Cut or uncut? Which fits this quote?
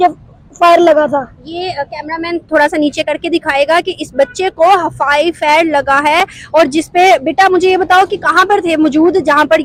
uncut